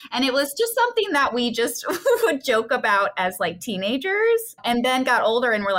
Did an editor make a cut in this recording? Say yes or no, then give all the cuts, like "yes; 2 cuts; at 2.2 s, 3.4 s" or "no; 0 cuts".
no; 0 cuts